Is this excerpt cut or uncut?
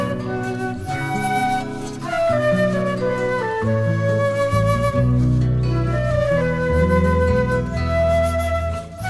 uncut